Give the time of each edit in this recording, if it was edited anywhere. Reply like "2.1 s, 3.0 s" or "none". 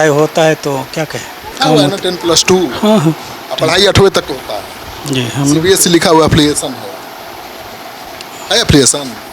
1.6 s